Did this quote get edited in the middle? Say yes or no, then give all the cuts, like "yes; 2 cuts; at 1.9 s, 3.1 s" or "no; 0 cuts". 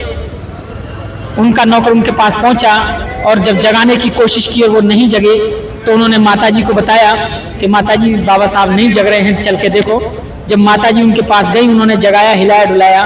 no; 0 cuts